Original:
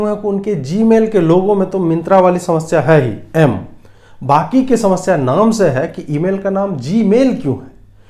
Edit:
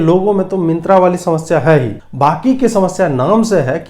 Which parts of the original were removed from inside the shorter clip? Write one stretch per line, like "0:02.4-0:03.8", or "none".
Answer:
0:03.2-0:04.1